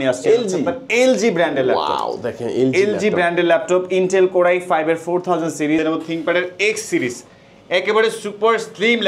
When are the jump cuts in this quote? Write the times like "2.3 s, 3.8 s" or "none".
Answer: 5.8 s